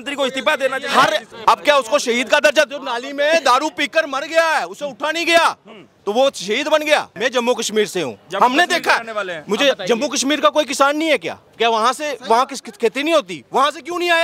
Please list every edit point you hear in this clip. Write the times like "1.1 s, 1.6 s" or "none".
1.3 s, 7.1 s